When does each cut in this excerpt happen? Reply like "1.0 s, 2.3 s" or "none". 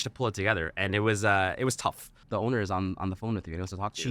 2.2 s